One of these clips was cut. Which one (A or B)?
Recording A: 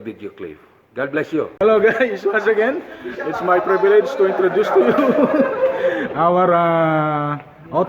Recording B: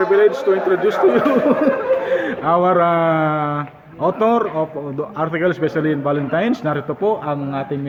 A